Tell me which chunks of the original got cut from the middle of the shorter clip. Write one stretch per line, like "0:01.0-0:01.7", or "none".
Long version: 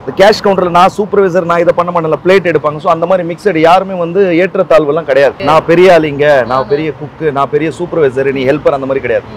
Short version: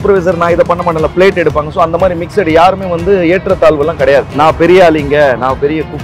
none